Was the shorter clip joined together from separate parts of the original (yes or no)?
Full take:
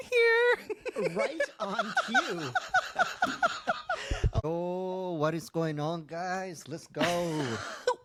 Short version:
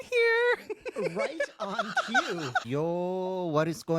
yes